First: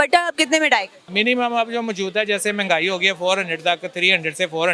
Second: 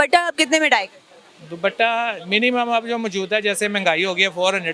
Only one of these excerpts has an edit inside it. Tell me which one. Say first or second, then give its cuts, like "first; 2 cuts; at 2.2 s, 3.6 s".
first; 1 cut; at 1.0 s